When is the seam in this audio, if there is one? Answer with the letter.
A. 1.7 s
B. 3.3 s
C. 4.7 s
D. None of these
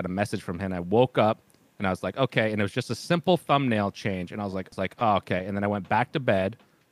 C